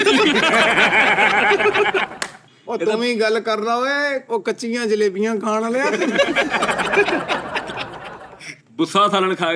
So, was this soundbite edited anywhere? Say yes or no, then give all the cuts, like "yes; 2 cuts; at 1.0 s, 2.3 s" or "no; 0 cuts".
no; 0 cuts